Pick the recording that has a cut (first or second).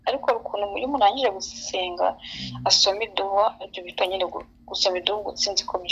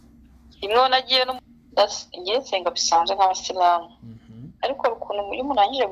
second